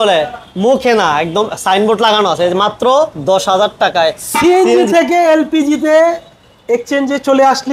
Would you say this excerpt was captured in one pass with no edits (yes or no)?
yes